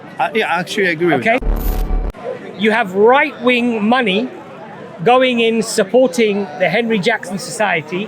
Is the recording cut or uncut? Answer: cut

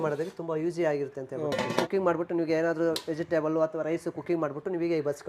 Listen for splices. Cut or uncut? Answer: cut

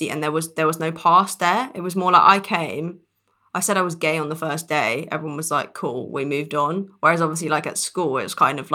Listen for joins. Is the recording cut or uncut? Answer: uncut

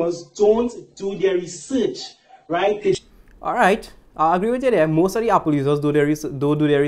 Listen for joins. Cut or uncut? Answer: uncut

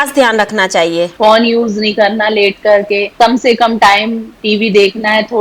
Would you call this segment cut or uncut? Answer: cut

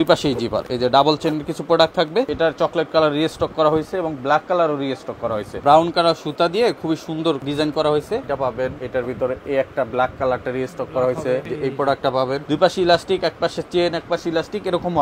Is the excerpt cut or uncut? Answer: cut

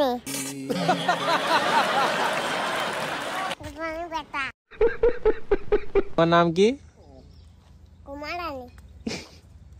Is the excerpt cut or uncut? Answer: cut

